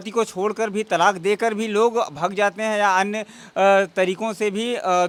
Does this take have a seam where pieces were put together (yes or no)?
no